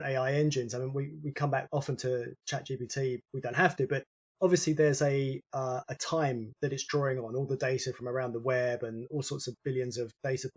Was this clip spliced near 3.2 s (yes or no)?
yes